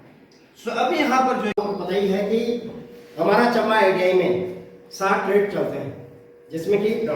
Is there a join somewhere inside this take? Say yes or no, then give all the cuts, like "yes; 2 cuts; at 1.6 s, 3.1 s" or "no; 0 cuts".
yes; 1 cut; at 1.6 s